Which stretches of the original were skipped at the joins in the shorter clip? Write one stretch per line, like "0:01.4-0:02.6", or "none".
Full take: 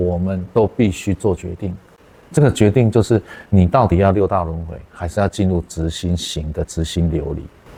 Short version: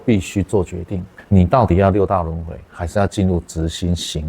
0:01.9-0:03.4